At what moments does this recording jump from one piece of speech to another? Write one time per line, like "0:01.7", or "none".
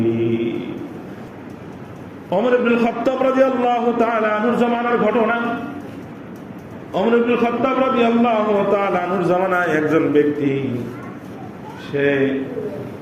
0:01.3